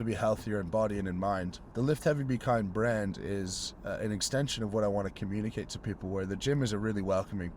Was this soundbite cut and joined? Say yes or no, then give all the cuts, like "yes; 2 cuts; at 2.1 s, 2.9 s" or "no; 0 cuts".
yes; 1 cut; at 1.6 s